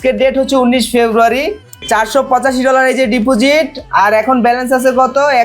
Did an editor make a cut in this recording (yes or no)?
yes